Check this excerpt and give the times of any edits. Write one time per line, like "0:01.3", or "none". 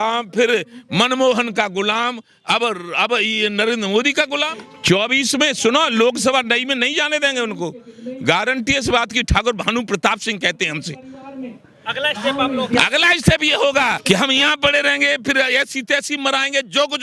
0:04.7
0:14.0